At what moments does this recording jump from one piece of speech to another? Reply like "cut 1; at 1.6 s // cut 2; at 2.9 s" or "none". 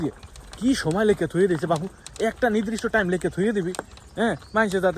none